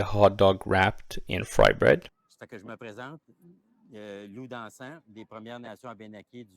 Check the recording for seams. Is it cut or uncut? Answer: cut